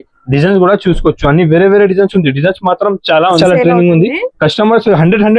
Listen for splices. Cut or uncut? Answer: cut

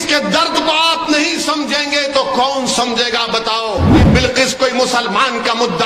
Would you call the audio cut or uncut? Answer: cut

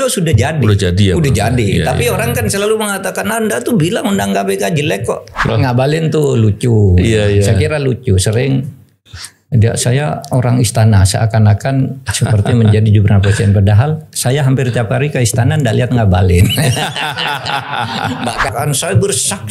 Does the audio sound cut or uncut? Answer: cut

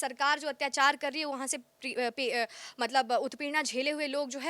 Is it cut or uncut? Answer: uncut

